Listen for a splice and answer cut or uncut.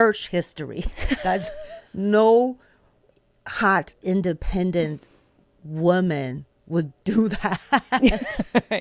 uncut